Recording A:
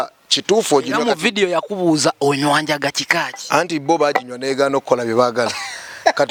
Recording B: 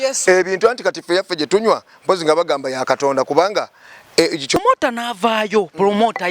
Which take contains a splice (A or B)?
B